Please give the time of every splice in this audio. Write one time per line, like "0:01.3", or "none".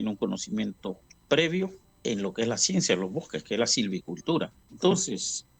0:01.1
0:01.9
0:04.6